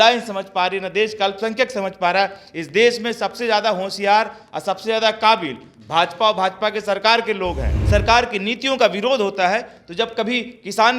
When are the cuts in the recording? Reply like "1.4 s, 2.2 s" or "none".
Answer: 7.8 s

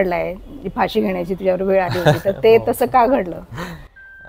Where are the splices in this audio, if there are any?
none

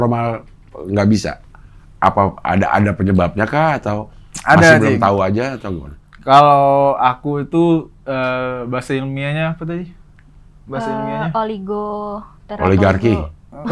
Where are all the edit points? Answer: none

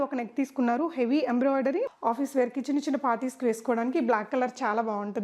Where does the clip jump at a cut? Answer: 1.8 s

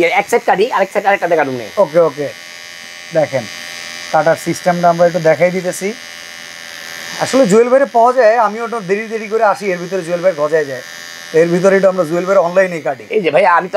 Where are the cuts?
none

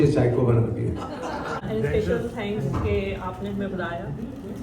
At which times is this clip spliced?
1.6 s

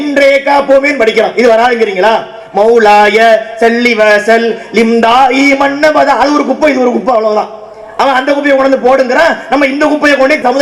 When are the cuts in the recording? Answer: none

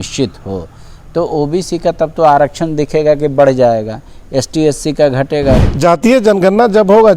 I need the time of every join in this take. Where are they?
5.7 s

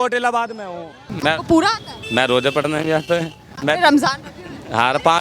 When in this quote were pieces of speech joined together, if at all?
1.1 s

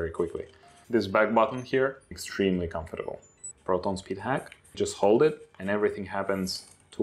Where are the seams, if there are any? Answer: 2.1 s, 3.5 s, 4.8 s

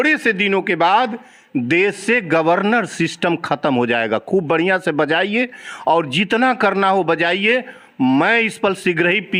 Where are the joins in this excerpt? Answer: none

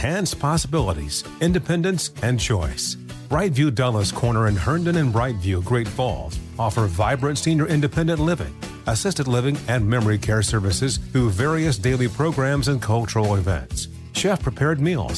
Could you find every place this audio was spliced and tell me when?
none

